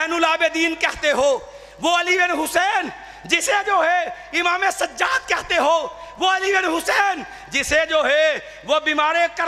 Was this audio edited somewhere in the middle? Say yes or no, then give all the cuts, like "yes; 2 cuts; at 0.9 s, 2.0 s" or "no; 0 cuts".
no; 0 cuts